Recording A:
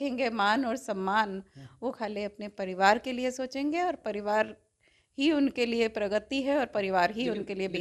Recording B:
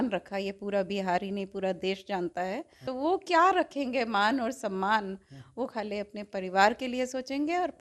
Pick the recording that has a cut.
B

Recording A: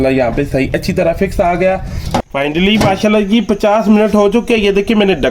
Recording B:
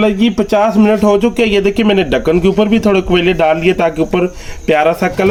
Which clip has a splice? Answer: A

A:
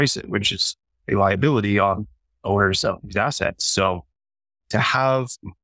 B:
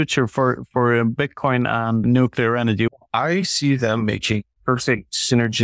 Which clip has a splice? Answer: B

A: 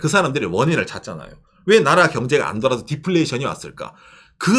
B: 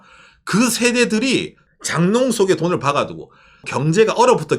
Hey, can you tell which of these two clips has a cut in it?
B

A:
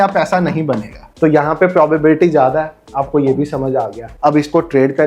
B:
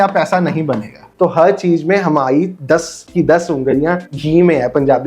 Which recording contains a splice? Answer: B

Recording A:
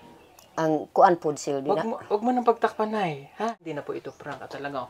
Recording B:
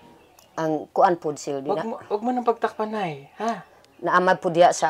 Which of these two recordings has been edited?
A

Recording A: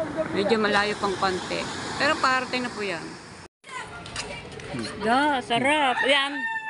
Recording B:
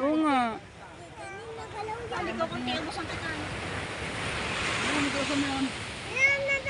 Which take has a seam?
A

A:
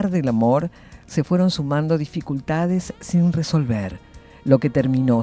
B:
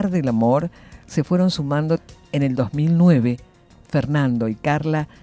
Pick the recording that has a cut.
A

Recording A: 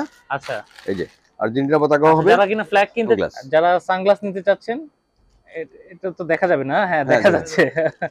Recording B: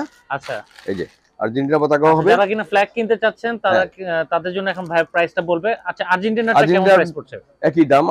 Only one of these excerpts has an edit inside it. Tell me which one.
A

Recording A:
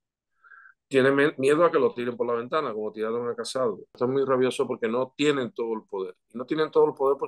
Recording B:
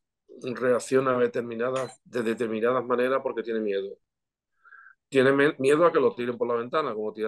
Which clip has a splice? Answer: A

